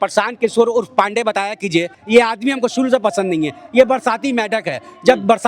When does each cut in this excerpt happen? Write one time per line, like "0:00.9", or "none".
0:02.0